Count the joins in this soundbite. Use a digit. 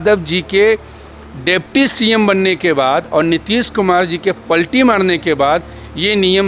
0